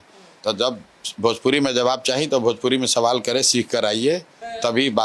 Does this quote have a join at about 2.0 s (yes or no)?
no